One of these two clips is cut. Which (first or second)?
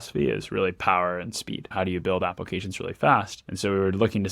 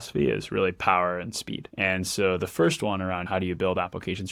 first